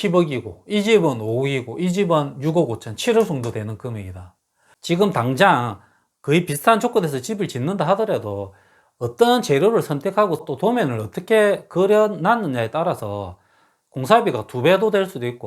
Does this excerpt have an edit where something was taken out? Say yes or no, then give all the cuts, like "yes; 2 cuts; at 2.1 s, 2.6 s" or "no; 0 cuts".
yes; 1 cut; at 4.7 s